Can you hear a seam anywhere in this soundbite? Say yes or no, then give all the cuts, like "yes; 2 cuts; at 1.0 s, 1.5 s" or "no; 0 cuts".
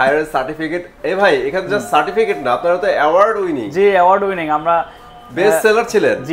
no; 0 cuts